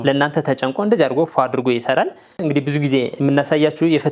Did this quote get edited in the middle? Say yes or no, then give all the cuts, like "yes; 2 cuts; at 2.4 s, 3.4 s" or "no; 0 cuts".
yes; 1 cut; at 2.2 s